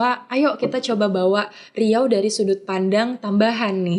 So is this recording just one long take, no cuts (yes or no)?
yes